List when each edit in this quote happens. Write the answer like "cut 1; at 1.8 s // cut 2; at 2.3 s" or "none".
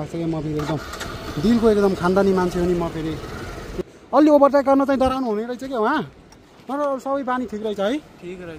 cut 1; at 3.8 s